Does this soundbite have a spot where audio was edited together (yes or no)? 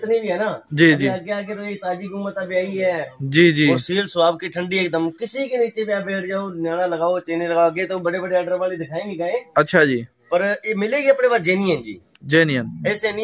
no